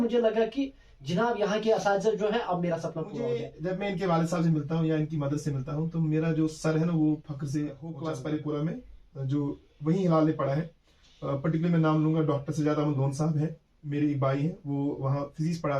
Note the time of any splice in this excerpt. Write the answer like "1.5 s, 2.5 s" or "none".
3.1 s, 7.9 s